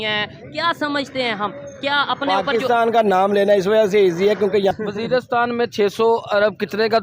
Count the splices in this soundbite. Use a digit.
1